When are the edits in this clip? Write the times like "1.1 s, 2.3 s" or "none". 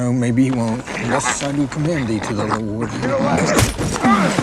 2.9 s